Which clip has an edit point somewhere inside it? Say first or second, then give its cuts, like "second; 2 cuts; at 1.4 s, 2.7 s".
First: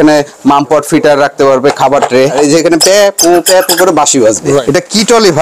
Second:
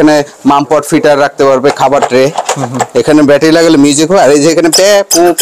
first; 2 cuts; at 2.4 s, 4.6 s